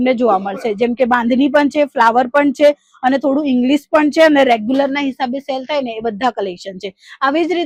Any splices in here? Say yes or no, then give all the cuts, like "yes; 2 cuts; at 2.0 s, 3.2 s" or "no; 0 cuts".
no; 0 cuts